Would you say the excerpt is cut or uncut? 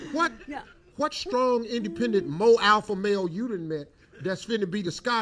cut